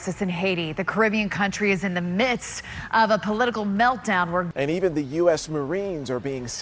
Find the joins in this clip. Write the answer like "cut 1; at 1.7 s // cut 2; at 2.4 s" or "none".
cut 1; at 4.5 s